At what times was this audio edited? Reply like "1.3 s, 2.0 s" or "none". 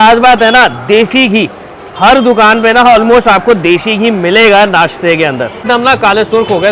5.6 s